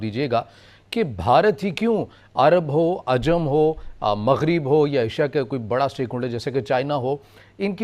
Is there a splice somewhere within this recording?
no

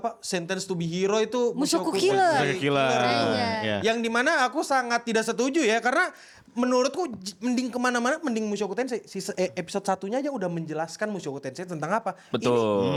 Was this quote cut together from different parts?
no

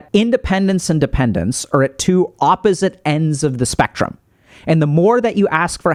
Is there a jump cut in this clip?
no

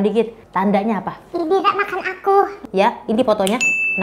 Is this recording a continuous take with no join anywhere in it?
no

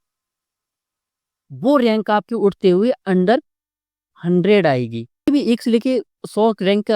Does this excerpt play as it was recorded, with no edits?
no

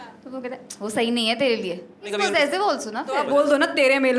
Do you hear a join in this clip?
yes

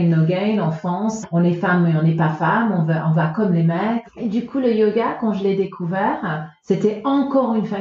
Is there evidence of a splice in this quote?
yes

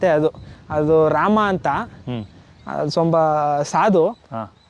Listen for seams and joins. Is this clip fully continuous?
yes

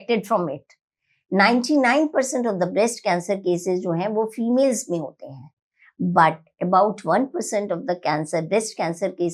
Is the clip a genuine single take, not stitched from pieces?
yes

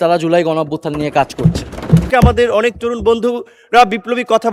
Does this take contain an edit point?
yes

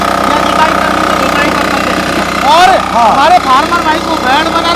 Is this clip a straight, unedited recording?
yes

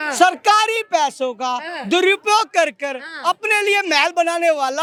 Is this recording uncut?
yes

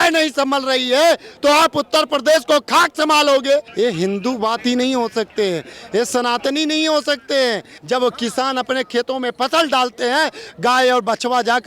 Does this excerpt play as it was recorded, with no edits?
no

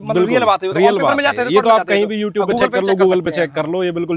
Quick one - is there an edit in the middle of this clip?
no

